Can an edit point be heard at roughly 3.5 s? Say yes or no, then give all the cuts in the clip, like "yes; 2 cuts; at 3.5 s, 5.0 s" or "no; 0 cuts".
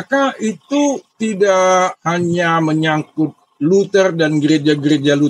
no; 2 cuts; at 1.1 s, 2.0 s